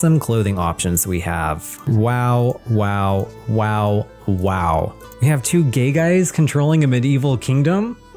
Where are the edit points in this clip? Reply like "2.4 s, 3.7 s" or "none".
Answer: 5.0 s